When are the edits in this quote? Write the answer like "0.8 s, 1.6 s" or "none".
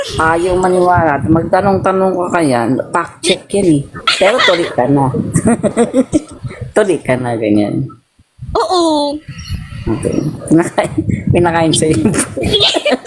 4.0 s